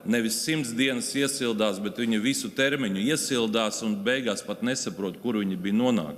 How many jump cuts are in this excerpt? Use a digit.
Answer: 0